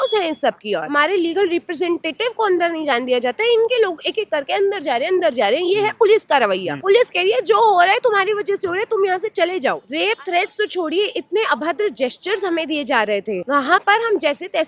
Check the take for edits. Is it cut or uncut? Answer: cut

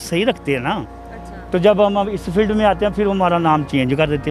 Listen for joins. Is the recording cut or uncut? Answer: uncut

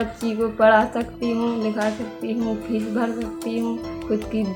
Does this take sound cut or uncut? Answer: uncut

